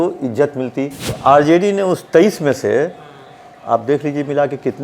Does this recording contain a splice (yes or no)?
yes